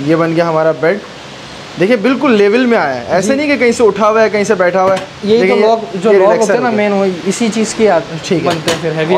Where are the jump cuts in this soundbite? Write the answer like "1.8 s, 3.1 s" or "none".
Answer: none